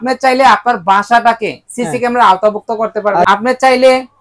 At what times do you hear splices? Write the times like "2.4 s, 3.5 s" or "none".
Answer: 3.3 s